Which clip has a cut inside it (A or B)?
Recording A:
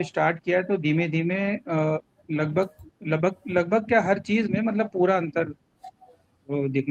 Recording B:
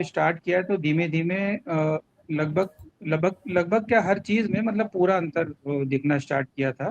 B